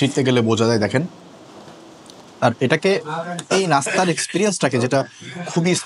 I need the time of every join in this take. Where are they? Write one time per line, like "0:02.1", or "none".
none

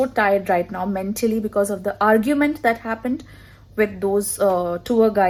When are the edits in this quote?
none

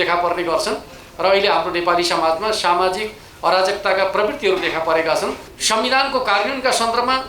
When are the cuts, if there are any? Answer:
0:05.5

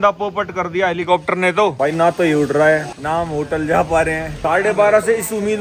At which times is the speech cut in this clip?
0:01.8

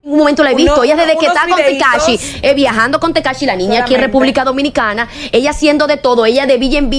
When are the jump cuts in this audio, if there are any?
none

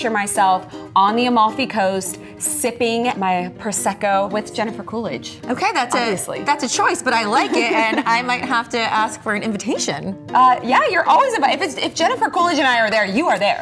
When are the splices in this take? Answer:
0:03.2
0:04.3

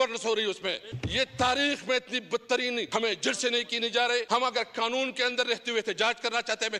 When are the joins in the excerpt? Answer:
0:00.9
0:02.9
0:04.3

